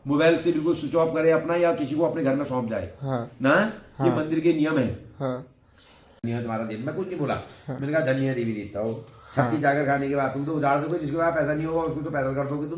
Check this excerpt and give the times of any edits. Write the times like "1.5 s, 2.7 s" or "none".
6.2 s